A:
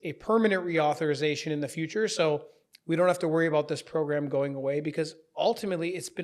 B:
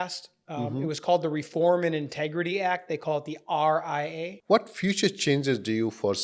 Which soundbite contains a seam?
B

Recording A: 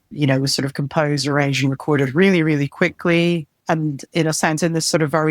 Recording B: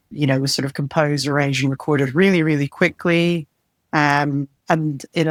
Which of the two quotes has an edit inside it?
A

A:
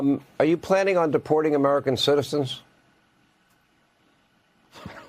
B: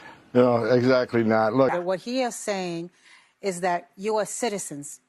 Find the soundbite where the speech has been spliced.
B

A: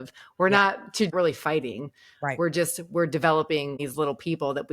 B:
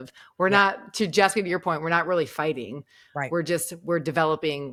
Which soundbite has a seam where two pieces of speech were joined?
A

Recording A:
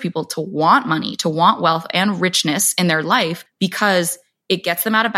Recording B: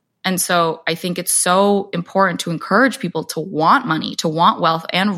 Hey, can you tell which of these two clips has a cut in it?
A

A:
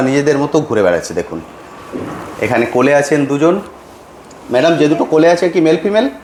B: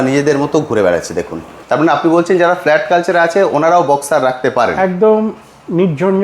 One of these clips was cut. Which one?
B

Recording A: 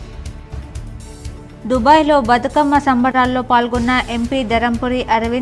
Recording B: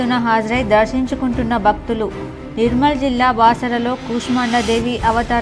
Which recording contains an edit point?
A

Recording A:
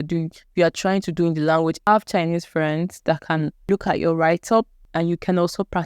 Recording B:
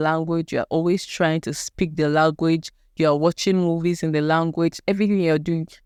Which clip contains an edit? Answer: A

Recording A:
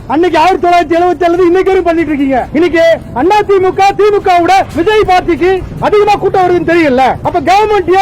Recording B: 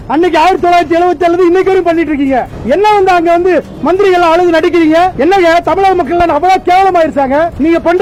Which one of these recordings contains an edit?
A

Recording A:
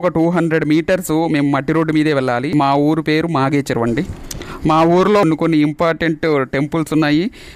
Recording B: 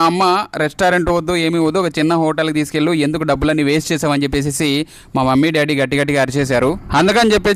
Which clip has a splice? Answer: A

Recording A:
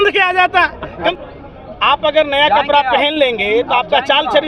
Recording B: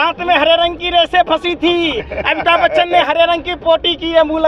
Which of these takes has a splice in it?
A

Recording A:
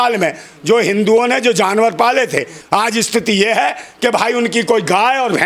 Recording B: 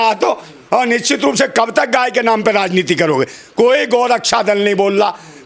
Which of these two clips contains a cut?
A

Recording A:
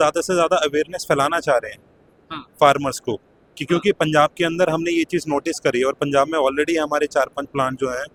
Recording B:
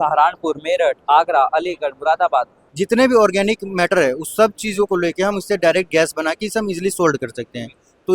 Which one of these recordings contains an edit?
B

